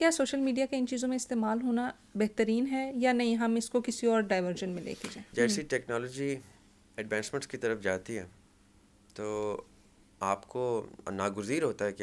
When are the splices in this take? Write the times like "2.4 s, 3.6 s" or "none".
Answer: 5.2 s